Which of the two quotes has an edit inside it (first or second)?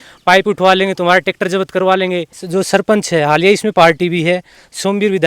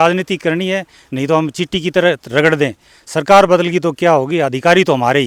first